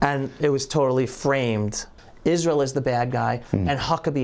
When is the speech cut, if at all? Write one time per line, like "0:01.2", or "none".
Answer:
0:02.0